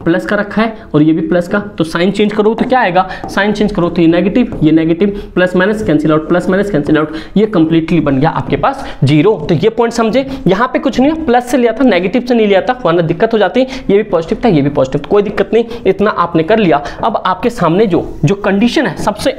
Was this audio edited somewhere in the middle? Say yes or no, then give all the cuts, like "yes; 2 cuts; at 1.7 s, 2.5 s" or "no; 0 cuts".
no; 0 cuts